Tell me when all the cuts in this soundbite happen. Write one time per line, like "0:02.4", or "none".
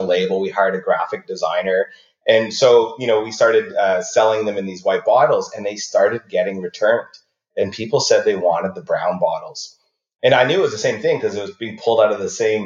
none